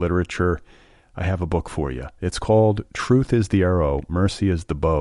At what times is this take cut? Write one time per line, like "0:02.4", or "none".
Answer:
none